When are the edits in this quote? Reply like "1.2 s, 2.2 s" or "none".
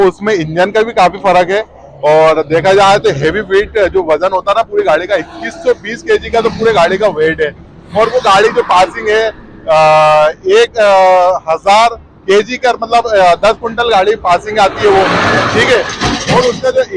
none